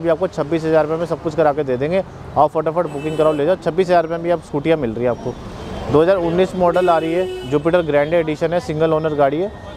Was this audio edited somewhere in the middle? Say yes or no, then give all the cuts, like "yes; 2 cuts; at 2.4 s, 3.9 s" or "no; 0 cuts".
no; 0 cuts